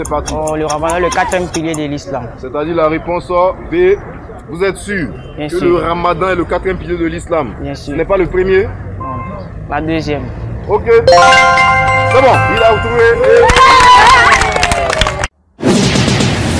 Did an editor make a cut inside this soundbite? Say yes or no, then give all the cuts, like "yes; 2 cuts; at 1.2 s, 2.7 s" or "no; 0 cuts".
yes; 1 cut; at 15.3 s